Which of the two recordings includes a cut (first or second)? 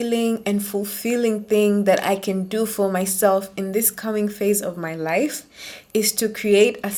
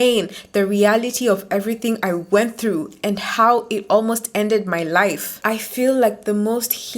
second